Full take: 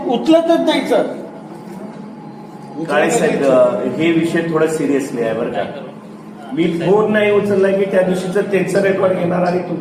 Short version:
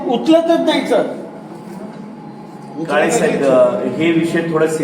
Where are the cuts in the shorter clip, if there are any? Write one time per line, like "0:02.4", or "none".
none